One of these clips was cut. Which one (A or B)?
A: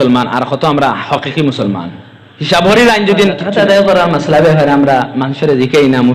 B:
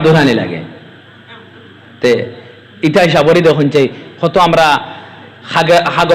A